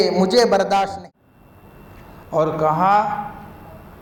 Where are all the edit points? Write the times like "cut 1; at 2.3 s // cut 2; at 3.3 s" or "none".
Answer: cut 1; at 1.0 s